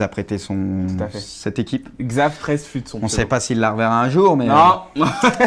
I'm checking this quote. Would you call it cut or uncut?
uncut